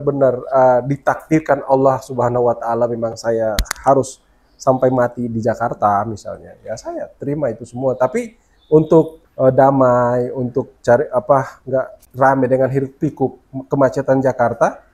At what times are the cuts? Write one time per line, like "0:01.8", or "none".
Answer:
0:12.0

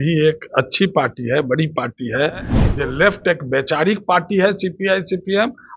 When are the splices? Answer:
0:02.5

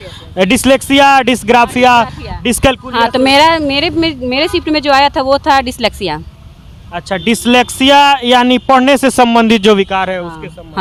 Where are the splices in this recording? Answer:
none

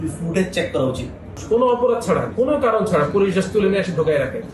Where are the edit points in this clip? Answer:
0:01.4

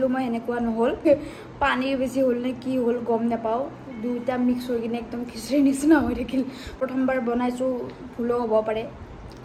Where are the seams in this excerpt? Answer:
0:01.1
0:06.8

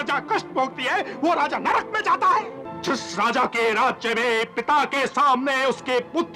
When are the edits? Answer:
0:02.6

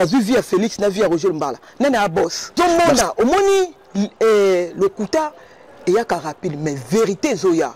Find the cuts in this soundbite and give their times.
0:02.6

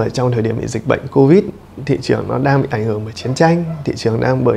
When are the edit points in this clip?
none

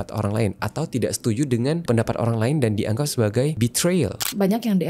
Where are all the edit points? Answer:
0:01.8
0:04.2

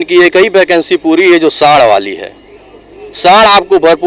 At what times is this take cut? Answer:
none

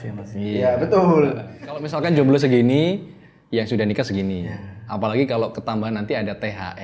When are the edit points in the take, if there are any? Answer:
0:01.9

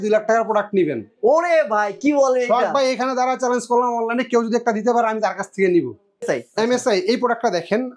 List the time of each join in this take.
0:06.2

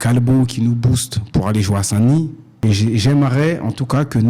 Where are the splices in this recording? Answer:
0:02.5

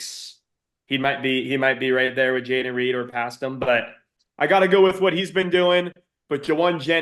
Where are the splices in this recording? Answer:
0:04.1

